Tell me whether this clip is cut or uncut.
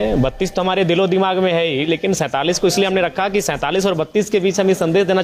uncut